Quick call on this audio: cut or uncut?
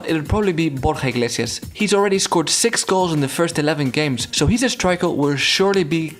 cut